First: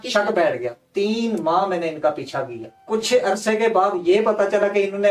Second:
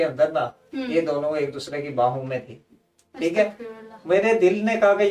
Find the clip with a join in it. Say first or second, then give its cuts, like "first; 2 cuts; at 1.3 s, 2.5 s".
first; 1 cut; at 2.8 s